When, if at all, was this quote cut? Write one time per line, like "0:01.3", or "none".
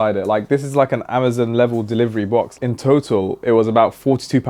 0:02.5